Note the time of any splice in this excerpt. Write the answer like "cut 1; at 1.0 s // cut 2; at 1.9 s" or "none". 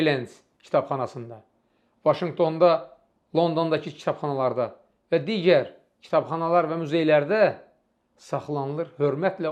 none